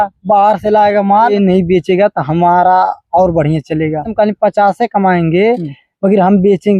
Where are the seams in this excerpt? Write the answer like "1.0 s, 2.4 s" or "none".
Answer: 1.3 s, 4.1 s